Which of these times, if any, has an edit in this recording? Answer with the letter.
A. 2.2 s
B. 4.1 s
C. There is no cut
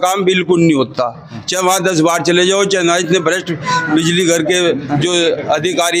C